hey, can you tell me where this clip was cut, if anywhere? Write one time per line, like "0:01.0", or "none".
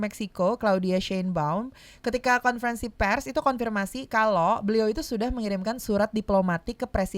none